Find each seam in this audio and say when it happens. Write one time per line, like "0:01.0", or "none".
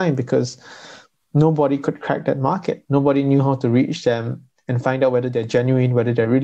none